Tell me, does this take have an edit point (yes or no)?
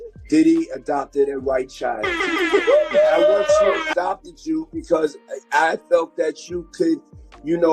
yes